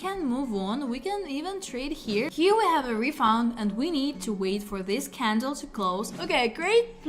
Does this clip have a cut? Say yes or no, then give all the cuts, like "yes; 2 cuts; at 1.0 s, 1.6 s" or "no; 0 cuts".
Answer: yes; 2 cuts; at 2.3 s, 6.1 s